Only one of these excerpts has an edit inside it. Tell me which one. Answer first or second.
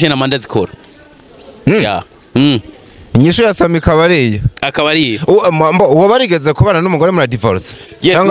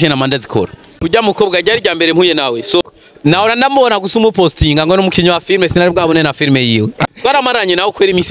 second